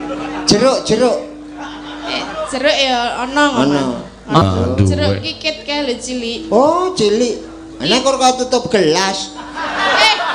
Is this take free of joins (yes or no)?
no